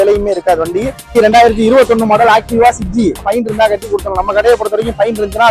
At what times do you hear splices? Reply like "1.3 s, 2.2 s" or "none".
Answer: 1.1 s, 3.3 s